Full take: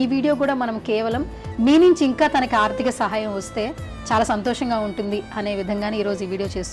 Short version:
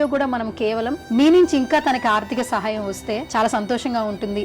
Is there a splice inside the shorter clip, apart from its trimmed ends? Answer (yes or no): yes